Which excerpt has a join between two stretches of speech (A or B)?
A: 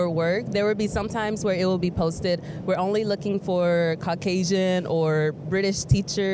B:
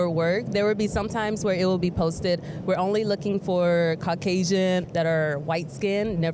B